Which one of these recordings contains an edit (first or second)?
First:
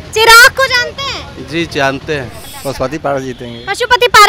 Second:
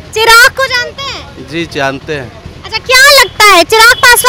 first